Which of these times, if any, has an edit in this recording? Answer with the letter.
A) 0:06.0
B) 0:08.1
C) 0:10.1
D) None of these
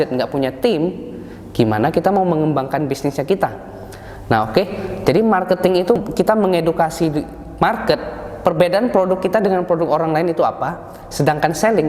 A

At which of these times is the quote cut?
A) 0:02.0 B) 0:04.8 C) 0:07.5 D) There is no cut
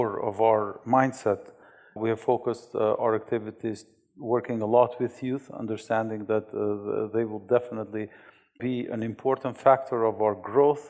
A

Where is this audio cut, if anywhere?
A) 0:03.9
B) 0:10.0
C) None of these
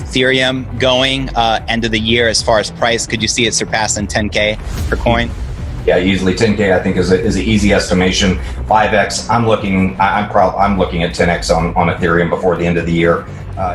C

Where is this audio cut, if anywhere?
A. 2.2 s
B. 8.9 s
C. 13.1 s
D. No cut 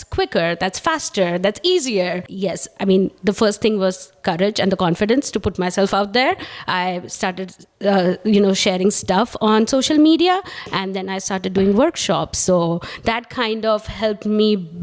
A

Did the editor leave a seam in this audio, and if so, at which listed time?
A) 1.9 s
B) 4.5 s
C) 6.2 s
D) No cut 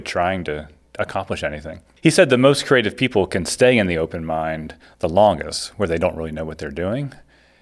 D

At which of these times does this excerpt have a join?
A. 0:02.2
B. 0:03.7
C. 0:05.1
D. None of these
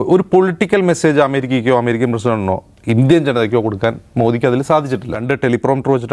C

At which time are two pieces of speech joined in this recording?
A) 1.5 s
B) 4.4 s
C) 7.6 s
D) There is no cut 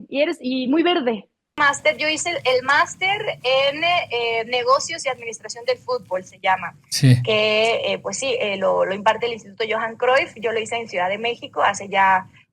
A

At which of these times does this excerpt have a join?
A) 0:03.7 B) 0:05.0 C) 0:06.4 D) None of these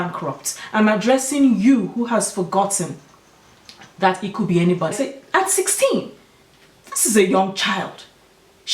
B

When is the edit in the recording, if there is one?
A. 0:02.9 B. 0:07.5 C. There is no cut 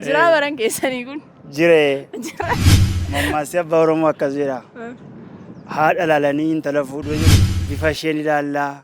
B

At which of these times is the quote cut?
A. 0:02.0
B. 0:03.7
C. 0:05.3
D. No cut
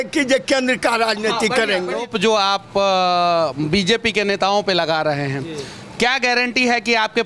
A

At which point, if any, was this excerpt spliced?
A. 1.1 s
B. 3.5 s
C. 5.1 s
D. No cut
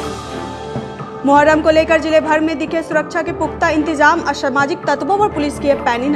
A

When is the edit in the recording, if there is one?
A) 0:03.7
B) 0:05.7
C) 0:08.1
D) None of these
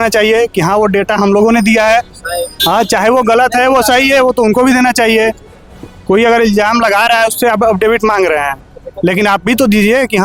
D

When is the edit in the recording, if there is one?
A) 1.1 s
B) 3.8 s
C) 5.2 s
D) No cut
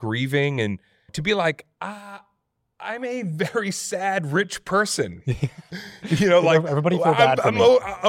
A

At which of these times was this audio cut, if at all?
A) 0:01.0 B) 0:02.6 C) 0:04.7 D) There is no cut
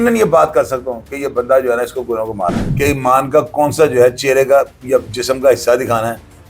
B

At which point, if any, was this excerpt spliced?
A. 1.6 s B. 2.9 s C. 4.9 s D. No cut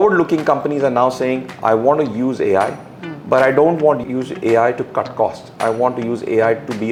D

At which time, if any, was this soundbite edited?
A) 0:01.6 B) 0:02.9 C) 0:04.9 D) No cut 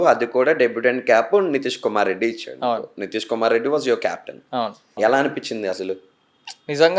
C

